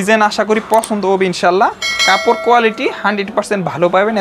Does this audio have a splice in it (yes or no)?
no